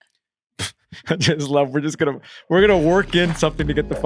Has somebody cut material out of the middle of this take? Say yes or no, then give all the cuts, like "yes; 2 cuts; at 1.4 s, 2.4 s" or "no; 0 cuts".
no; 0 cuts